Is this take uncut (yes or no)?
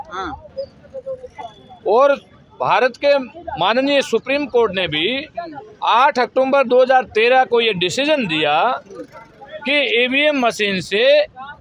yes